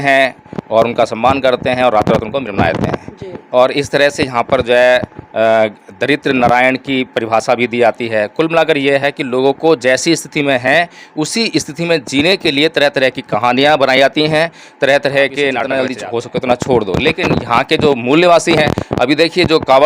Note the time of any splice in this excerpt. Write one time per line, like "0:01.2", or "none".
0:15.8